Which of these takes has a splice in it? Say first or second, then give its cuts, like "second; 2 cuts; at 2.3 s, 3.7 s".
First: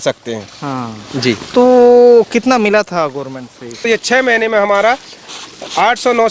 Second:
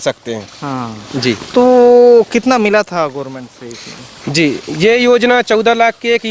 first; 1 cut; at 3.8 s